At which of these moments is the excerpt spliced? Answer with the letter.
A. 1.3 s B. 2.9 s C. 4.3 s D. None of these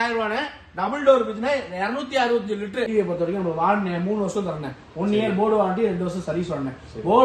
B